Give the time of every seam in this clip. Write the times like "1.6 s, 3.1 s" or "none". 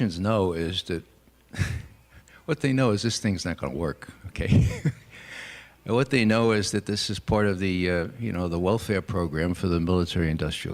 none

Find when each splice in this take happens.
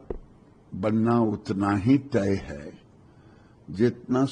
none

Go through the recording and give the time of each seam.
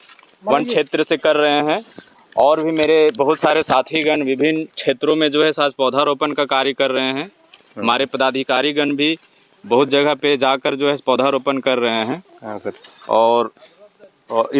none

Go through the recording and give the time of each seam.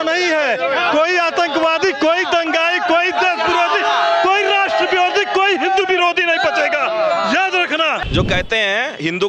8.0 s

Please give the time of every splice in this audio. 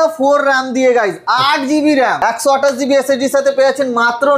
2.2 s

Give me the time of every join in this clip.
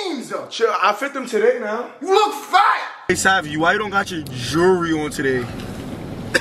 2.9 s

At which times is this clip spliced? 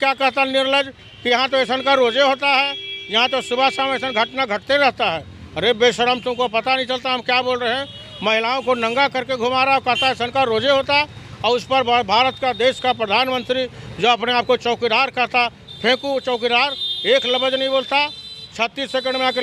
none

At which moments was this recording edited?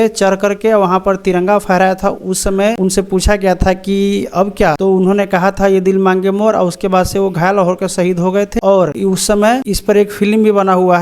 2.8 s, 4.8 s, 8.6 s, 9.6 s

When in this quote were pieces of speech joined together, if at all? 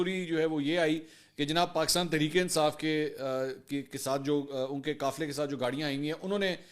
none

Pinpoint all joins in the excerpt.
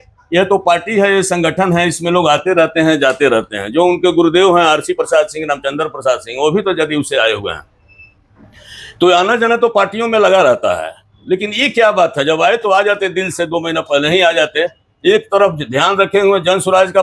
none

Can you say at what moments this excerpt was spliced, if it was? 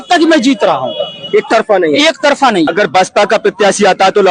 2.7 s

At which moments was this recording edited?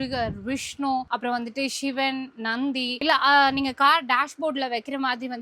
none

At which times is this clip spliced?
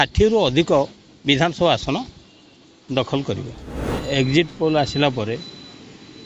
3.9 s

